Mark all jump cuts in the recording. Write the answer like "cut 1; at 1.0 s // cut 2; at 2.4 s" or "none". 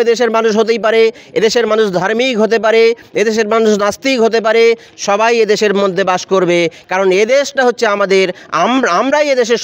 none